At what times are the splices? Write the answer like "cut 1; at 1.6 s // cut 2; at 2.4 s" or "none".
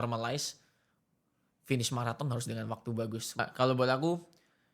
cut 1; at 3.4 s